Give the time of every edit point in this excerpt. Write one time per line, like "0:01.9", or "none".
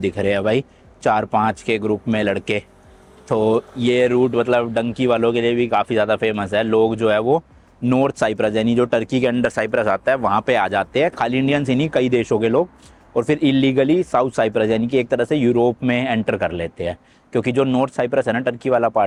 none